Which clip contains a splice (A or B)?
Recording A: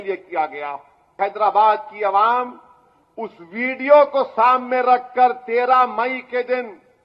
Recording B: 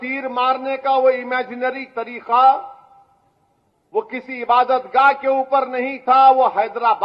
A